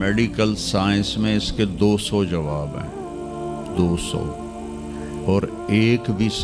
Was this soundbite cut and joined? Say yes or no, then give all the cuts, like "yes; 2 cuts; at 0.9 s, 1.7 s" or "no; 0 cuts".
no; 0 cuts